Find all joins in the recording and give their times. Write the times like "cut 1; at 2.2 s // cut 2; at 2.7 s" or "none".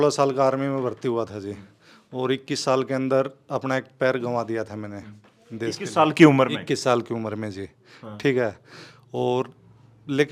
none